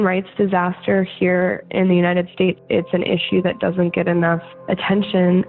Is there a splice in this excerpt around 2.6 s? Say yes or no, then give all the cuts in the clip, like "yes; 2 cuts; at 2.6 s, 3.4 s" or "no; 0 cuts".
yes; 2 cuts; at 2.6 s, 4.5 s